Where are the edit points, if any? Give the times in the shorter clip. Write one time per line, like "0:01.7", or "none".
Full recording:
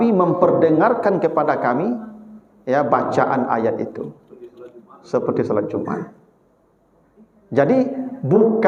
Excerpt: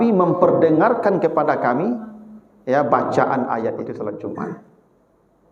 0:03.9